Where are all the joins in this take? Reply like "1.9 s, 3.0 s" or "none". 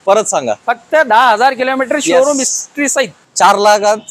3.2 s